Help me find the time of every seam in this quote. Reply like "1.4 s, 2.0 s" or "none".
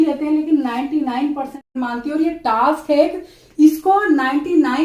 1.7 s